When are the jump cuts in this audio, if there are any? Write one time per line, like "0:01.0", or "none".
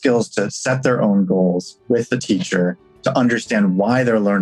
none